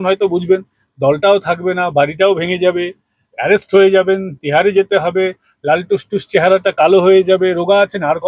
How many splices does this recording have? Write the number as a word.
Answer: zero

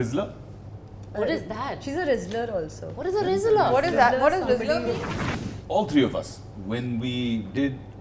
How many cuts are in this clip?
one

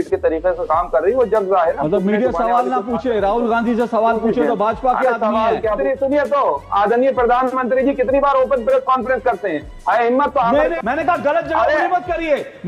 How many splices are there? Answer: two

